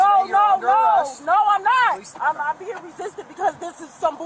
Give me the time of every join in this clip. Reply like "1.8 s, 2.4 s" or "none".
2.1 s